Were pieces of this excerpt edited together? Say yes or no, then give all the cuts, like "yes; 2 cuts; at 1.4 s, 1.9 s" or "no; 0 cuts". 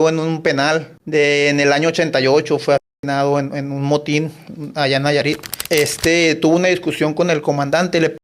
yes; 2 cuts; at 0.9 s, 5.5 s